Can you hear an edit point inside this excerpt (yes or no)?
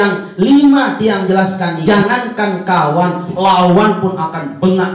yes